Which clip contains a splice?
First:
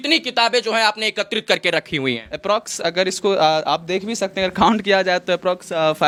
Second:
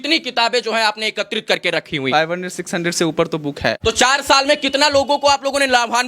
second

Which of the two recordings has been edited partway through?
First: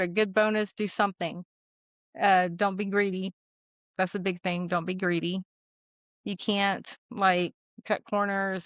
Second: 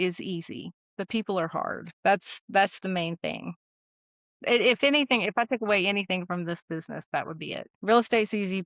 second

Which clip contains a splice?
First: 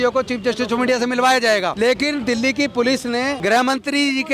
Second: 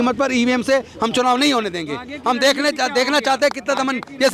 first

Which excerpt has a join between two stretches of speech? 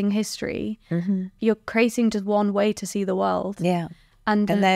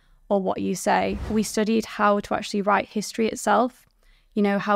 second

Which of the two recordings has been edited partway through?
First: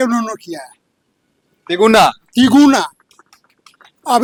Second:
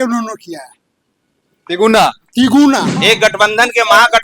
second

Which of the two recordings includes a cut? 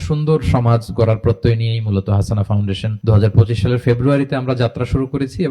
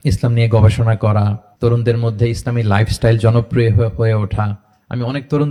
first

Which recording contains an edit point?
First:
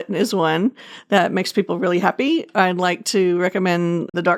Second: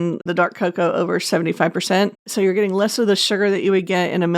second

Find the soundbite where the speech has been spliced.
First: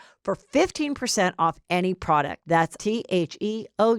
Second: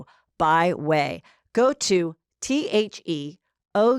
first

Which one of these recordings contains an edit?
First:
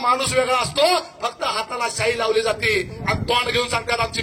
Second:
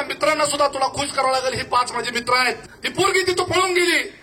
second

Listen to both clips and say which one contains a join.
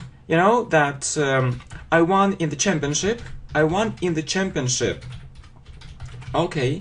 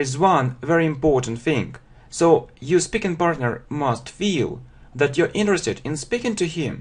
second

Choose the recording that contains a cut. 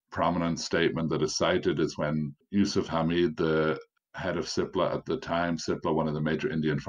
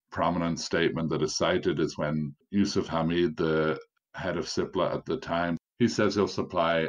second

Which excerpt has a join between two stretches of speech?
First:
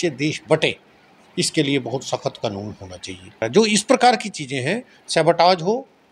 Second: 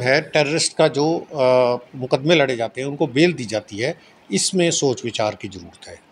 first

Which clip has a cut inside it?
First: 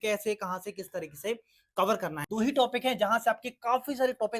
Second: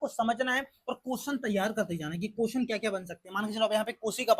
first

